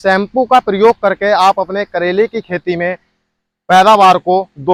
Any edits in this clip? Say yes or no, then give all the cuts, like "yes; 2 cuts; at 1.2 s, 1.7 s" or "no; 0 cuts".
no; 0 cuts